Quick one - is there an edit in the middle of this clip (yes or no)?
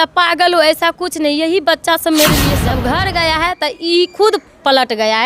yes